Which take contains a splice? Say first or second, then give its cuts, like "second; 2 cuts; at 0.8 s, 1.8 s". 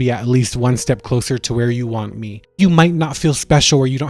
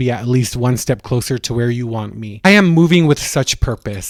first; 1 cut; at 2.6 s